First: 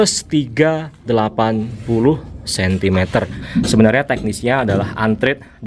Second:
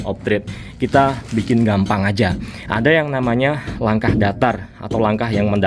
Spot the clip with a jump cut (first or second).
first